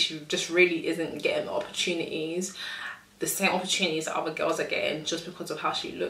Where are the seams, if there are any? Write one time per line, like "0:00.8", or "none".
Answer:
none